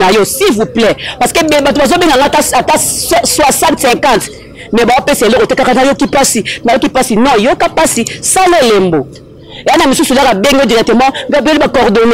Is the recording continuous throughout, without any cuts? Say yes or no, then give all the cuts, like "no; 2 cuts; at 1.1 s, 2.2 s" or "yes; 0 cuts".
yes; 0 cuts